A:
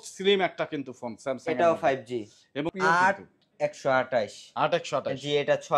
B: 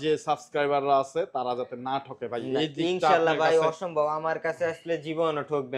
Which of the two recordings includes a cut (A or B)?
A